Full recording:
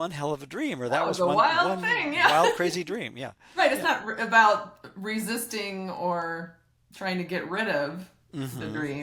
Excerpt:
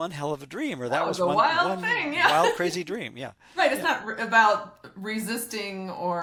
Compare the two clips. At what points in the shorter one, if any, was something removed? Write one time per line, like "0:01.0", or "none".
none